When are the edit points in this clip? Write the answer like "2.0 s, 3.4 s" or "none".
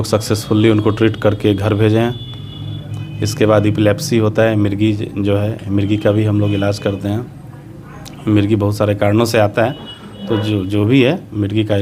none